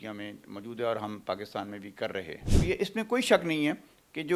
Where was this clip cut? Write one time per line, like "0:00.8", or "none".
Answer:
0:02.5

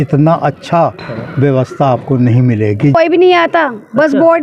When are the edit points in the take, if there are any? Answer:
0:02.9

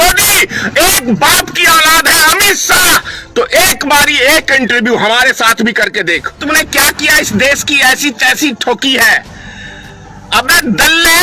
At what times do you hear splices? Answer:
0:06.4

